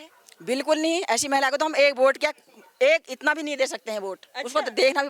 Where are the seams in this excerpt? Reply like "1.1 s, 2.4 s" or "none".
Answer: none